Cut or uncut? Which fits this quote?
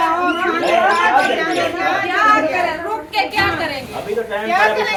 uncut